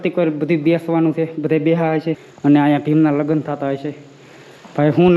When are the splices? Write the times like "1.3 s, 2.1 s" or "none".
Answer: 2.2 s